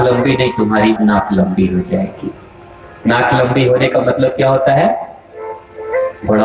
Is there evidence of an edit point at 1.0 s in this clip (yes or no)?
yes